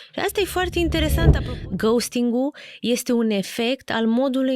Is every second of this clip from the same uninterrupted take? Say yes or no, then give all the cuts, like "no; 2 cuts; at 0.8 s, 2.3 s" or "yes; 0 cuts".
no; 1 cut; at 1.4 s